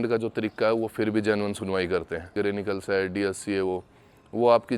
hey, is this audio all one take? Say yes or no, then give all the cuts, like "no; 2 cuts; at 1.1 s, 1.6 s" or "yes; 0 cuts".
no; 1 cut; at 2.3 s